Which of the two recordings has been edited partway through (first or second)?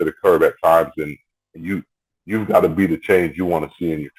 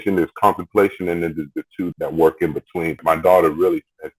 second